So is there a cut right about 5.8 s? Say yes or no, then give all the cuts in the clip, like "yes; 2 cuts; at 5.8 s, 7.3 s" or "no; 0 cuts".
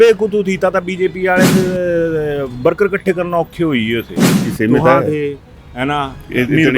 no; 1 cut; at 4.5 s